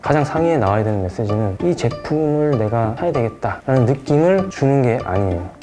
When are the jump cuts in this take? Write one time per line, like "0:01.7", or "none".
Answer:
0:01.5
0:03.2
0:04.5